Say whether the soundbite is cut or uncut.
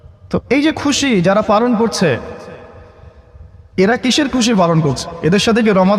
uncut